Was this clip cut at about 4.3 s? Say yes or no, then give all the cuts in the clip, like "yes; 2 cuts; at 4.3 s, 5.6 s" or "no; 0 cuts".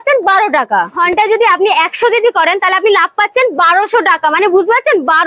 no; 1 cut; at 0.9 s